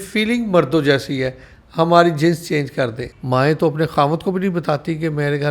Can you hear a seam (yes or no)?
yes